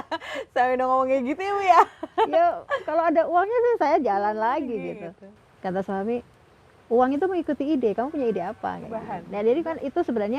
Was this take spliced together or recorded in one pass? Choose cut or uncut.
cut